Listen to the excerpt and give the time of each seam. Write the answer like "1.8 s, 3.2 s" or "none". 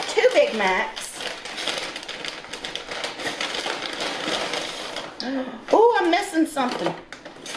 none